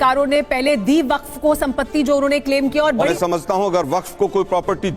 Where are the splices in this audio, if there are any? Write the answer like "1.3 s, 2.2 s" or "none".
3.1 s